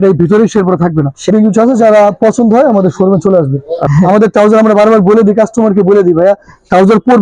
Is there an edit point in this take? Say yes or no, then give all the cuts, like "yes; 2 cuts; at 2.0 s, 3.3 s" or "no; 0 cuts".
yes; 2 cuts; at 1.3 s, 3.8 s